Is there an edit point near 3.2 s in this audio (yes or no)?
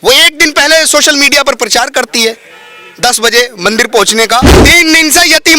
no